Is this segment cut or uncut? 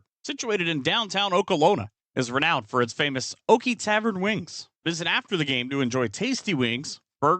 cut